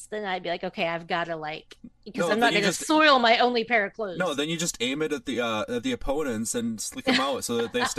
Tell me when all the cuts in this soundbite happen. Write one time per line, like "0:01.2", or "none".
none